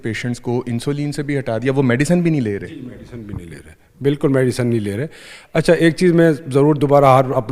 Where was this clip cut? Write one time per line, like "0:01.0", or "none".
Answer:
none